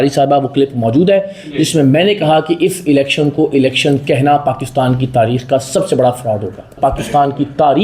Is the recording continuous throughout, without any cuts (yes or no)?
no